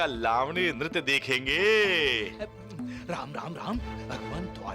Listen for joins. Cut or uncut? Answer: uncut